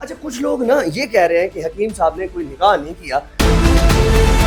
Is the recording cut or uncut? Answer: uncut